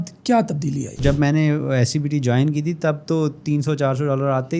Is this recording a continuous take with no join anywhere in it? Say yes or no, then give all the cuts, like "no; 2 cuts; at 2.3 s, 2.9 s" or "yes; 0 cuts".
no; 1 cut; at 1.0 s